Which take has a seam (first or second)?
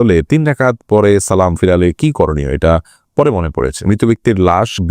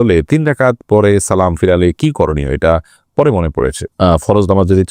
first